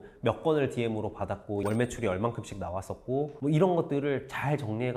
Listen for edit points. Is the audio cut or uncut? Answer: uncut